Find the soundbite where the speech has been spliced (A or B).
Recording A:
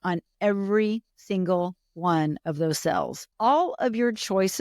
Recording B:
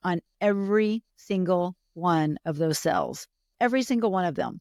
A